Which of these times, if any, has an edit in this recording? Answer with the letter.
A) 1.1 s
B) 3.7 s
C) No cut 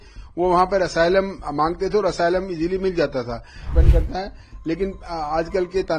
B